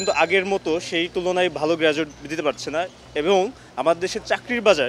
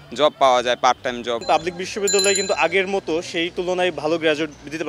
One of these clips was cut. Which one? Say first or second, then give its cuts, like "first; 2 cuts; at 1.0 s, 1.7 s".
second; 1 cut; at 1.4 s